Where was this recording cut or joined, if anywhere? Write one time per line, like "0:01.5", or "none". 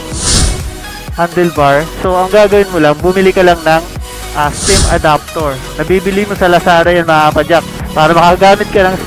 none